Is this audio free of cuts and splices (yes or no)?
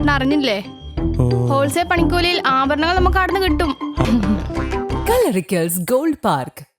no